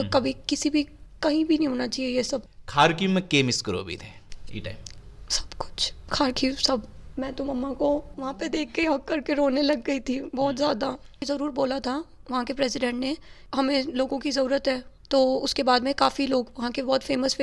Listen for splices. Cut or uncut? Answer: cut